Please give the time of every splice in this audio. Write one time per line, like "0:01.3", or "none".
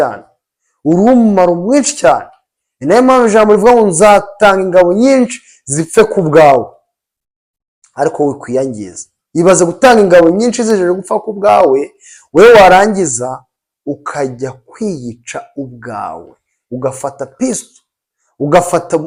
none